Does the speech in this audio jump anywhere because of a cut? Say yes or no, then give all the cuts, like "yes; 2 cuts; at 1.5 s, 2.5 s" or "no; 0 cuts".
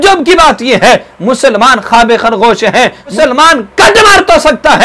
yes; 1 cut; at 3.1 s